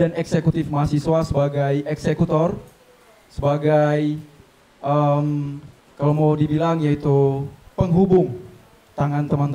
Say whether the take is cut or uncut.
uncut